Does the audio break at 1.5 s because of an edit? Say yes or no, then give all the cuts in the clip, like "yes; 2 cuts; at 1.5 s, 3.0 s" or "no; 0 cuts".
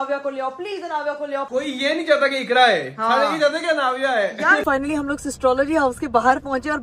yes; 2 cuts; at 1.5 s, 4.6 s